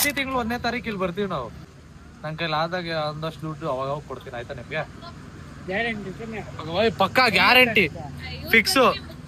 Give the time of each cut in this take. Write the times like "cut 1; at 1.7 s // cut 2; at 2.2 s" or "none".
cut 1; at 1.7 s